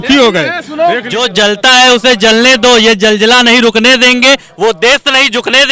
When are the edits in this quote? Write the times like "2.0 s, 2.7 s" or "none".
1.1 s